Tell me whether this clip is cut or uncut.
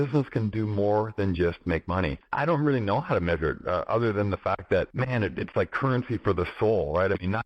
cut